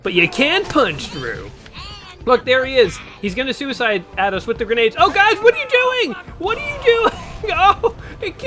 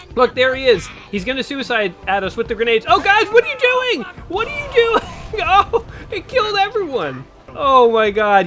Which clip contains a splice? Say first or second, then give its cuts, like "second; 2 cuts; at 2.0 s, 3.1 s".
second; 1 cut; at 7.5 s